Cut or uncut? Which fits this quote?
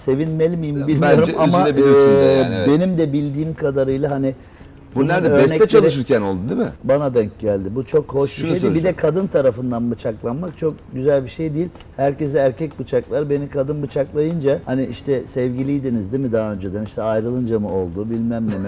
uncut